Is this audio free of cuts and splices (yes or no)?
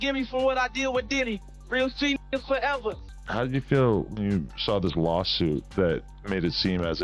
no